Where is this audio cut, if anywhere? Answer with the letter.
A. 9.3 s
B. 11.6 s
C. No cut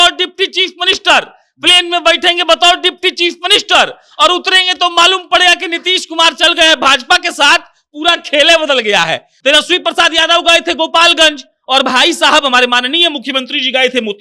A